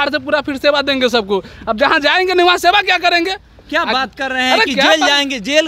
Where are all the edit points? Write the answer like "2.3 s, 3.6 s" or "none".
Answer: none